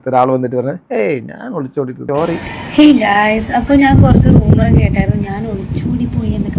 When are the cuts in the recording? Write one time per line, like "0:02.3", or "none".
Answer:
0:02.0